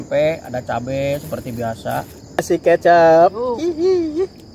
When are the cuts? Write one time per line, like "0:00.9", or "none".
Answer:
0:02.4